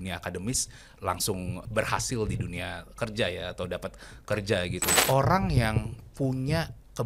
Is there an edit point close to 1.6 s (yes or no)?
yes